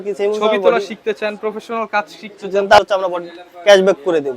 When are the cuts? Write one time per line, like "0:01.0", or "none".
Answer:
0:02.8